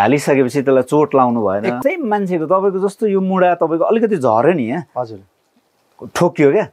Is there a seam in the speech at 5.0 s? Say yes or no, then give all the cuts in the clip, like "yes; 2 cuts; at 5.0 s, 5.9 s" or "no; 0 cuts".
no; 1 cut; at 1.8 s